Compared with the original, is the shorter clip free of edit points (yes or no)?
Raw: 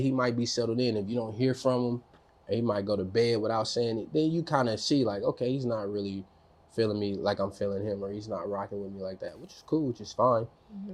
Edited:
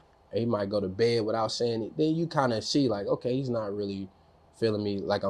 yes